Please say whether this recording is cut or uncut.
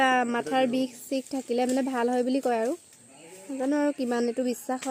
uncut